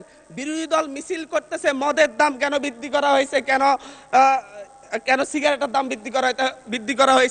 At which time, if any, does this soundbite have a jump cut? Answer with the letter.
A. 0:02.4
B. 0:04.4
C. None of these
C